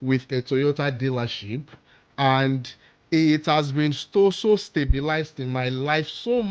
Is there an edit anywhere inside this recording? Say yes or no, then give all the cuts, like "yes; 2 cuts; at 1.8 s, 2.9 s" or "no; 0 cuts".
no; 0 cuts